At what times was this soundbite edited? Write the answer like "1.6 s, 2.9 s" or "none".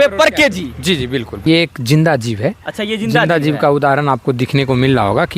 1.4 s